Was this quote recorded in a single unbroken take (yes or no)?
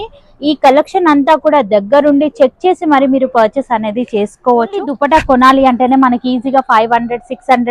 no